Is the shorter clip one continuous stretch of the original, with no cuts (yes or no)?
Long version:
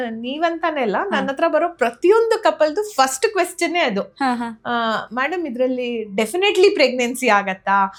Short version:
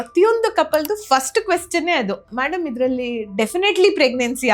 no